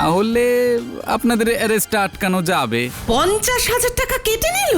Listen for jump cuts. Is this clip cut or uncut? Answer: cut